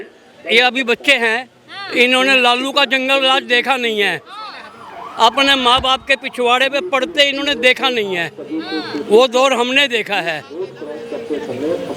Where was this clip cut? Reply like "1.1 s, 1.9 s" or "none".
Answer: none